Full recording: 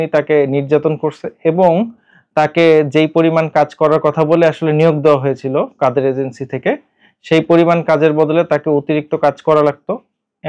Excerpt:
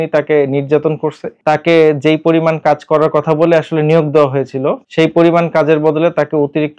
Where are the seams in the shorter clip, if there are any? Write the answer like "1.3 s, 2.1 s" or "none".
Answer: 1.3 s, 4.8 s